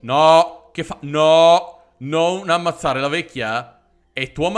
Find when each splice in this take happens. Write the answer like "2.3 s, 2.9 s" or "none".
none